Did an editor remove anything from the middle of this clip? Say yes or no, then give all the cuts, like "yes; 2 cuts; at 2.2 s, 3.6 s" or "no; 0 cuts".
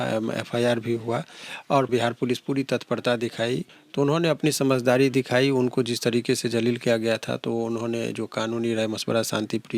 yes; 2 cuts; at 1.9 s, 3.8 s